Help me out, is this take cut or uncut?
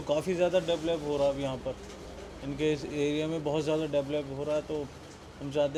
uncut